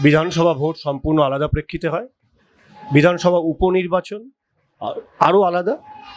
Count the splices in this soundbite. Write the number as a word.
zero